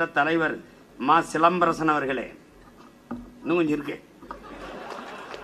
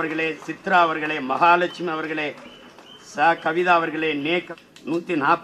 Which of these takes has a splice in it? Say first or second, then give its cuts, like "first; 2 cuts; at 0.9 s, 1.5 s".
second; 1 cut; at 4.5 s